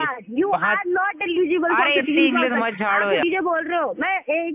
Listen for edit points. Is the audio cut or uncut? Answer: cut